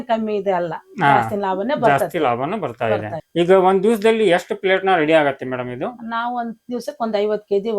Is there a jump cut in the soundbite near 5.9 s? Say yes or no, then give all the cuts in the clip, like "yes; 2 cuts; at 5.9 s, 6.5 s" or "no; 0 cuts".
no; 1 cut; at 3.2 s